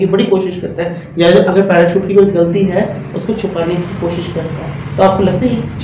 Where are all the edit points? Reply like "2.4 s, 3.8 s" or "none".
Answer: none